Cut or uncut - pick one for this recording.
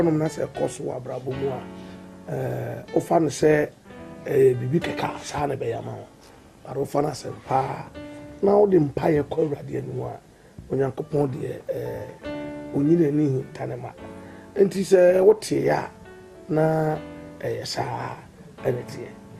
cut